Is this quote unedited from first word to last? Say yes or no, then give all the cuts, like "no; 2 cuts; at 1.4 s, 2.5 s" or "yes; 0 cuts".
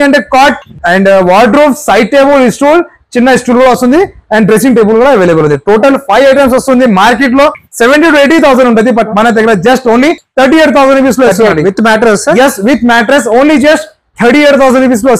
yes; 0 cuts